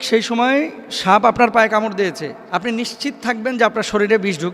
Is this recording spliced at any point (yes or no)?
yes